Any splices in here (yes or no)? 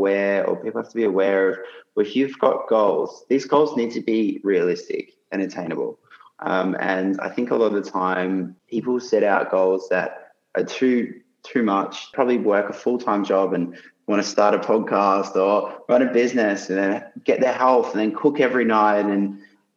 yes